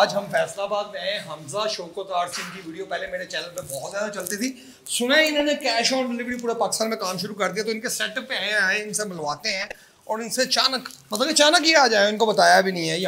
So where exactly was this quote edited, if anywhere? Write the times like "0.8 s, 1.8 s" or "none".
none